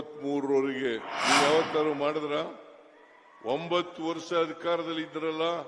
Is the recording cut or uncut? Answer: cut